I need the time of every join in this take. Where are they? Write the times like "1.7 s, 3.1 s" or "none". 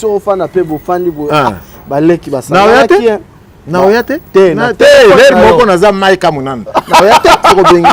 none